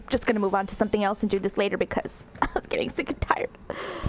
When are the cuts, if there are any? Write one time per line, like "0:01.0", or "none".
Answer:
none